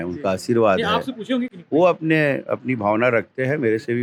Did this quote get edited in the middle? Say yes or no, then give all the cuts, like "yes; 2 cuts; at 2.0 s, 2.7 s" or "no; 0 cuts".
no; 0 cuts